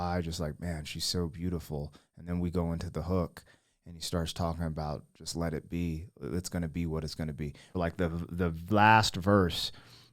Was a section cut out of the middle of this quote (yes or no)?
yes